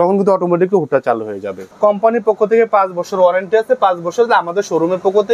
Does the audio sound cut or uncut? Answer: cut